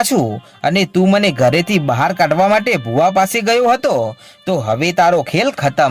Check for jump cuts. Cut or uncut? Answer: uncut